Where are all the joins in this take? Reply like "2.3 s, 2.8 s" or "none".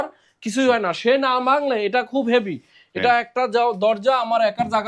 none